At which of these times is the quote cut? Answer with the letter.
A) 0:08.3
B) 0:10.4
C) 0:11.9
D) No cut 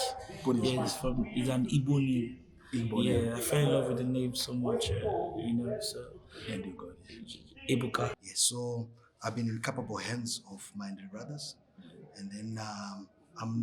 A